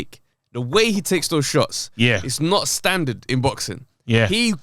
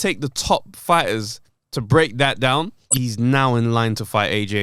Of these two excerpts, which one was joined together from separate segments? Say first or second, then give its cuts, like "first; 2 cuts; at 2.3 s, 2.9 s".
second; 1 cut; at 2.9 s